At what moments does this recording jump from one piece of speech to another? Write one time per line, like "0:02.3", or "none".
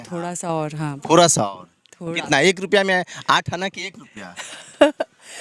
none